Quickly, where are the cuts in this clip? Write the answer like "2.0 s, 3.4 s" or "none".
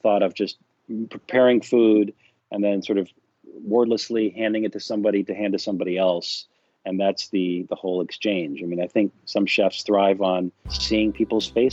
10.7 s